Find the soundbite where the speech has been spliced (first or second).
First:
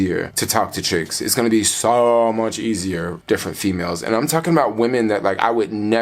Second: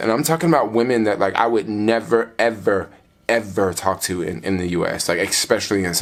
first